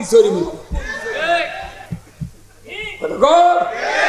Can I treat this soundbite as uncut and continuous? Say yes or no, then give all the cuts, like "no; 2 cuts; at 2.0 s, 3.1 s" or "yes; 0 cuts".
yes; 0 cuts